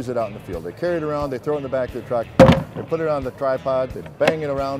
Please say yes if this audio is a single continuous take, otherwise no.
yes